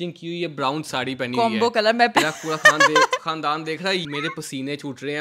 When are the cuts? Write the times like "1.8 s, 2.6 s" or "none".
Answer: 2.1 s, 4.0 s